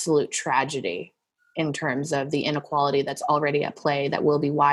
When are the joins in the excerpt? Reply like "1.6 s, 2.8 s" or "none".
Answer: none